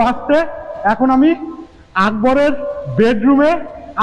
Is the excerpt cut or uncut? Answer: uncut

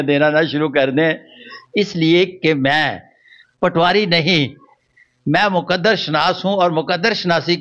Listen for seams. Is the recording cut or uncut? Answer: uncut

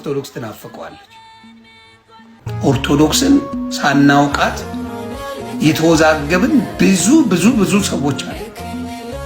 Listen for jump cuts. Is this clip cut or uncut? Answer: cut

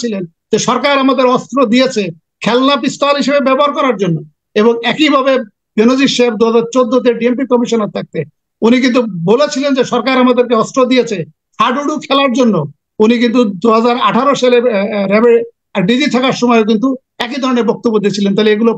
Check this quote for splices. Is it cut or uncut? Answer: uncut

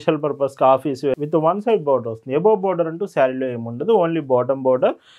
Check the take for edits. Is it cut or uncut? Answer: cut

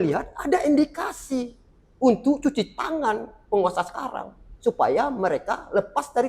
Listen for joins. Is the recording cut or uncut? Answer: uncut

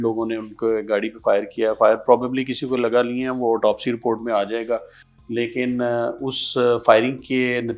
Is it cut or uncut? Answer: uncut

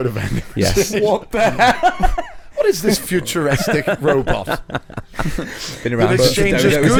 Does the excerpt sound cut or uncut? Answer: uncut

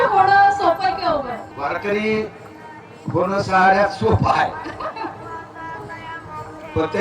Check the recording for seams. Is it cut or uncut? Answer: cut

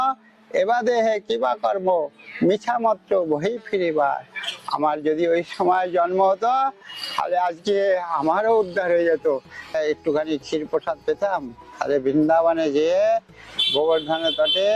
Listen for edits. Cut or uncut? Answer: cut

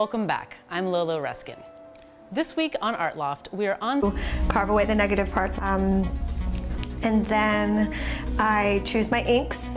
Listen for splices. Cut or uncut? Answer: uncut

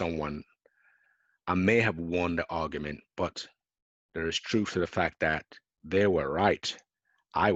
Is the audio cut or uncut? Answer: uncut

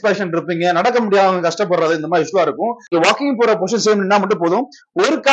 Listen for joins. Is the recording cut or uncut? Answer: cut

